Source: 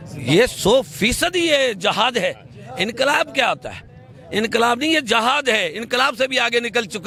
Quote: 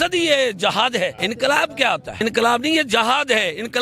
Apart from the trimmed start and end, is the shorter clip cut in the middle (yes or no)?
yes